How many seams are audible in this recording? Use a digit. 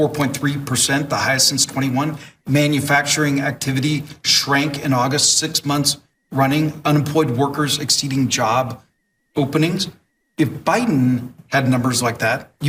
0